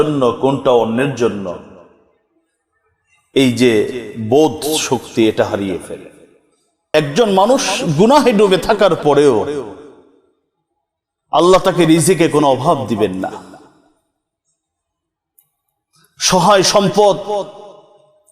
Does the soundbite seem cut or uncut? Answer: cut